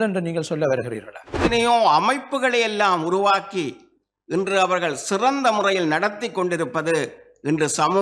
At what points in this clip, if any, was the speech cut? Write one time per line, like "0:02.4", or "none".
0:01.4